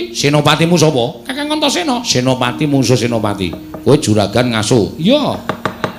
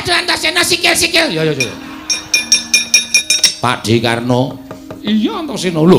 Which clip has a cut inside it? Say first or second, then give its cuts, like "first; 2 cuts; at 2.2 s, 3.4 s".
second; 1 cut; at 3.2 s